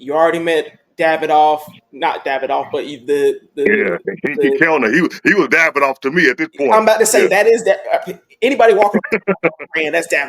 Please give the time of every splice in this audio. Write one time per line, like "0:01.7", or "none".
none